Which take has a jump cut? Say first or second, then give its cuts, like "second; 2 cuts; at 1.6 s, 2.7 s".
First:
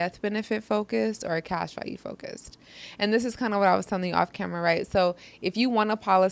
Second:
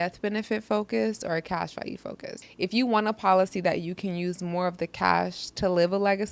second; 1 cut; at 2.4 s